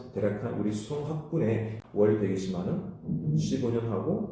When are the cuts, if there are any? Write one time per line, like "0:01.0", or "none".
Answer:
0:01.8